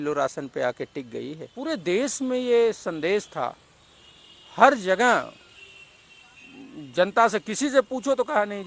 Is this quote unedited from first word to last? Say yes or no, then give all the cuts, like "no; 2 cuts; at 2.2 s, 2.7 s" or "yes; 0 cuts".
no; 1 cut; at 1.5 s